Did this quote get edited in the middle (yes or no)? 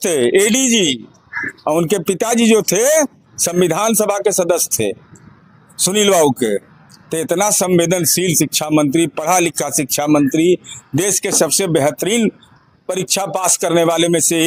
no